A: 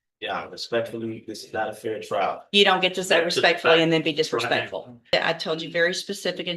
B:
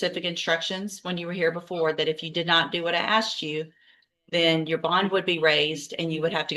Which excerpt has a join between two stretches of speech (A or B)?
A